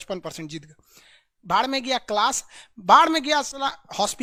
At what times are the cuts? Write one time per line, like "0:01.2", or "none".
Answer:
none